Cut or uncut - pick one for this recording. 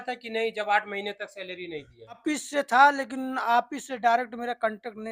cut